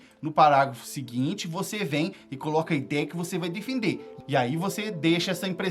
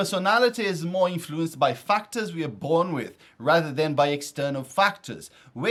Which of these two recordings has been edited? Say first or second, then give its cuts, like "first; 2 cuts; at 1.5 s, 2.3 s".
first; 1 cut; at 4.1 s